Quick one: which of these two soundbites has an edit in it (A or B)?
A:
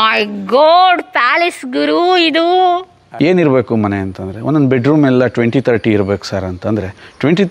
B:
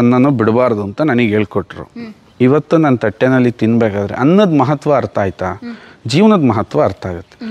A